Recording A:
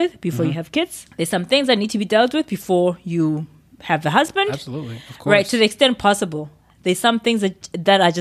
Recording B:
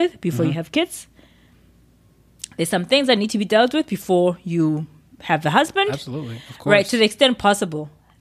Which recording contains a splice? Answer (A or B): A